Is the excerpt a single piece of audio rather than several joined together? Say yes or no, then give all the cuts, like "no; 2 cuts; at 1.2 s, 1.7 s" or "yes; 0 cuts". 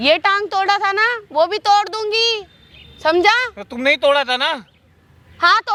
yes; 0 cuts